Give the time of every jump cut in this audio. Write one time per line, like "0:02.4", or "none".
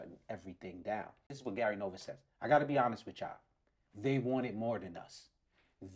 0:01.3